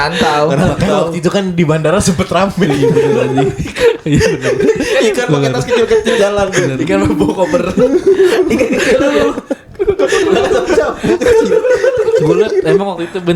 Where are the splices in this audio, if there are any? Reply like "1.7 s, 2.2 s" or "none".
none